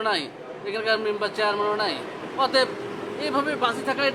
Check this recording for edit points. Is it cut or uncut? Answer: uncut